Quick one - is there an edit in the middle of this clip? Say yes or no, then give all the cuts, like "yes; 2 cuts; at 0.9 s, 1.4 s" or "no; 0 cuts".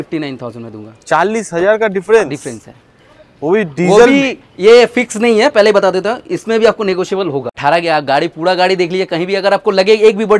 yes; 1 cut; at 7.6 s